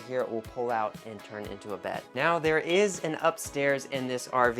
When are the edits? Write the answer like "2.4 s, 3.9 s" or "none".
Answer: 2.1 s